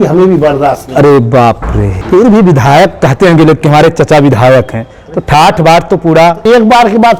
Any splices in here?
yes; 1 cut; at 1.9 s

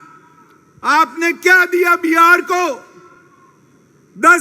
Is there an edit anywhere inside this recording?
no; 0 cuts

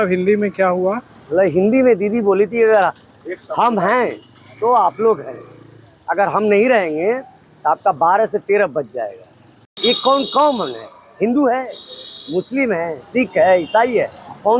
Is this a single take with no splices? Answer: no; 1 cut; at 9.7 s

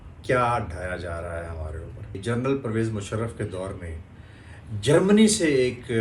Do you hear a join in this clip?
yes; 1 cut; at 2.2 s

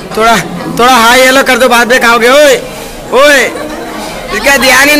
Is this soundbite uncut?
yes; 0 cuts

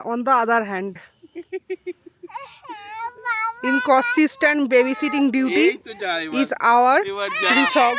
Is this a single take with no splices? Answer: yes; 0 cuts

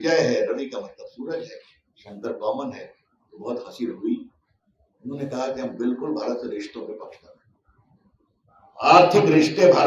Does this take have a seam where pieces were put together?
no; 0 cuts

